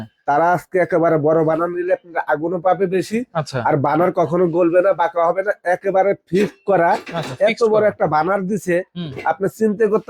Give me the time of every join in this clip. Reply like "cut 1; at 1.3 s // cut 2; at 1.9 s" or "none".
none